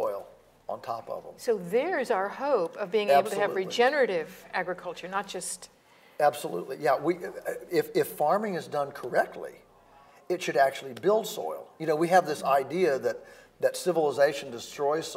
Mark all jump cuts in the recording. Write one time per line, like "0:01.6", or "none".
none